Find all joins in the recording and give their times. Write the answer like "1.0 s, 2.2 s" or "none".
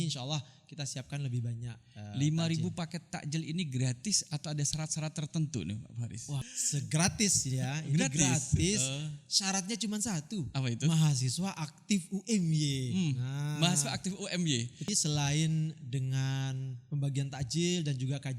6.5 s, 14.9 s